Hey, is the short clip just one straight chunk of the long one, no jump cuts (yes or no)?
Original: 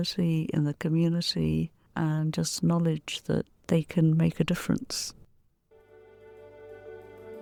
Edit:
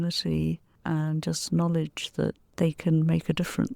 yes